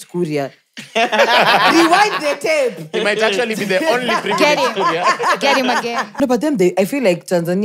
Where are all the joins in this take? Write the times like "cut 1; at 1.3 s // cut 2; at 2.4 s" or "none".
cut 1; at 6.1 s